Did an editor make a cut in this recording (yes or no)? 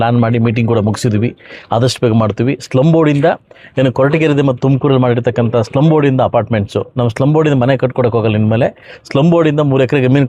no